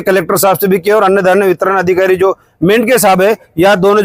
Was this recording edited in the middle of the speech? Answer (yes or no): no